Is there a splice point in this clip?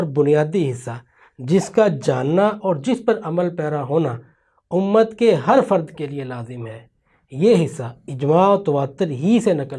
no; 0 cuts

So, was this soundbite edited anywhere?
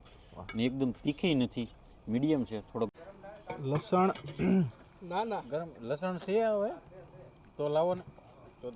yes; 1 cut; at 2.9 s

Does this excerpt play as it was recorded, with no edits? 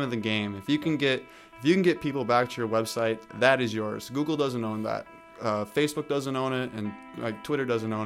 yes; 0 cuts

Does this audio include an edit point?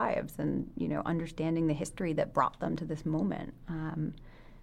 no; 0 cuts

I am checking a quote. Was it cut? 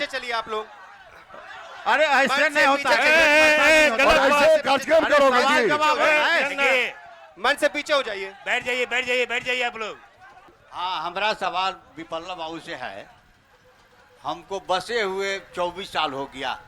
no; 0 cuts

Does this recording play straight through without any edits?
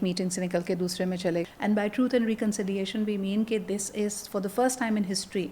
no; 1 cut; at 1.4 s

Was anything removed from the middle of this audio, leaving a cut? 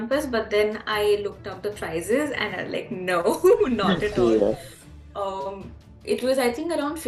no; 0 cuts

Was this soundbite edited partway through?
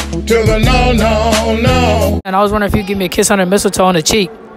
yes; 1 cut; at 2.2 s

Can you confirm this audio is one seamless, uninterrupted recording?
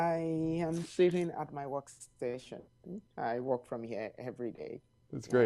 no; 1 cut; at 3.3 s

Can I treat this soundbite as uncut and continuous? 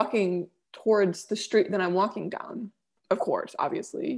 yes; 0 cuts

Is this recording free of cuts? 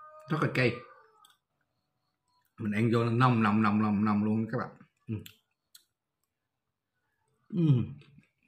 yes; 0 cuts

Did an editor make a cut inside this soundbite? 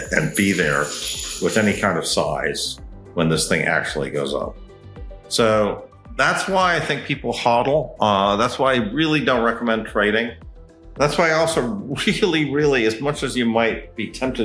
no; 0 cuts

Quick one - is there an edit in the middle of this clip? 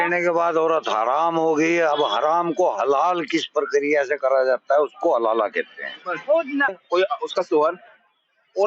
yes; 1 cut; at 6.8 s

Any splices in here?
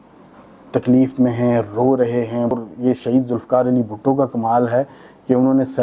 yes; 1 cut; at 2.5 s

